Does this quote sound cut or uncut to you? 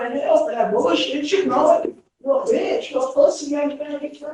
uncut